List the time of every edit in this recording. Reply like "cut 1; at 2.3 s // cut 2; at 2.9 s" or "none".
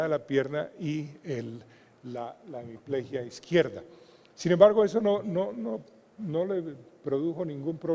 cut 1; at 4.6 s